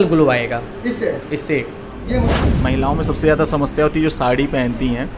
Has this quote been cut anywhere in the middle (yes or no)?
yes